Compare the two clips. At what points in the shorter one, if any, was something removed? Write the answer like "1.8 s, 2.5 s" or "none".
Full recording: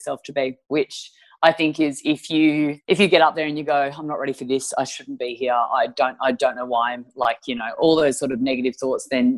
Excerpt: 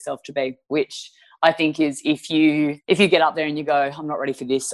none